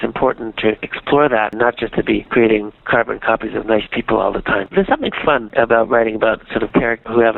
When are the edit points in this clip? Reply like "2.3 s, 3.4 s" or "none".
1.5 s, 2.8 s, 4.7 s